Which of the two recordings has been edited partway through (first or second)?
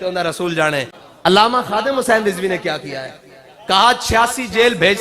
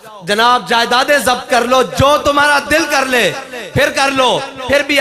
first